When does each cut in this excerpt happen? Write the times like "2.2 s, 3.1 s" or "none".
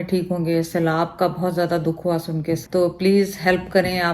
2.6 s